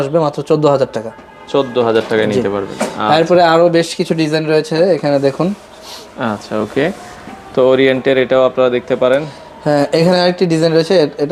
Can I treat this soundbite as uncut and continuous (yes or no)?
yes